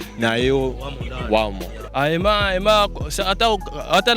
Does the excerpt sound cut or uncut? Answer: cut